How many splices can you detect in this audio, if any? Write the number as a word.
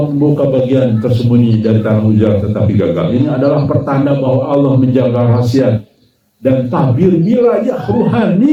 zero